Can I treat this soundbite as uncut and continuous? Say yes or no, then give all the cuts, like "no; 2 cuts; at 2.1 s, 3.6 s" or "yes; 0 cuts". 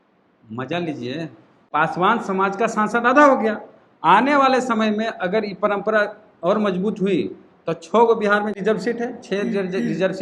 no; 2 cuts; at 1.5 s, 8.6 s